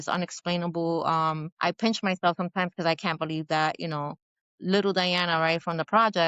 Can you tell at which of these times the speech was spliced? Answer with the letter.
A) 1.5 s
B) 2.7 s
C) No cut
A